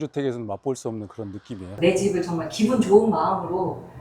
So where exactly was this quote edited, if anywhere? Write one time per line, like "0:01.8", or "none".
0:01.7